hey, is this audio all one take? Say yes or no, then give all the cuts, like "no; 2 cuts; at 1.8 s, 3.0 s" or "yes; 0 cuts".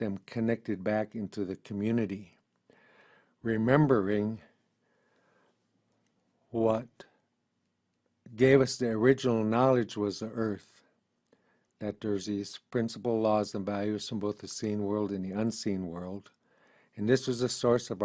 no; 1 cut; at 15.1 s